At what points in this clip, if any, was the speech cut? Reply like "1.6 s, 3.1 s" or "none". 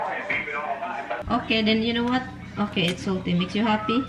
1.2 s